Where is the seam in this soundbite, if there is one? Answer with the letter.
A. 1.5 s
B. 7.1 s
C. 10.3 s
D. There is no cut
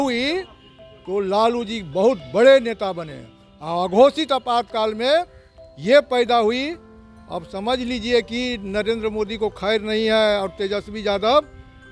D